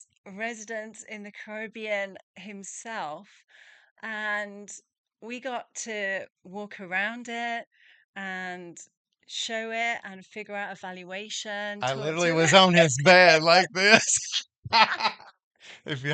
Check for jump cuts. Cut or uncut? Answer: uncut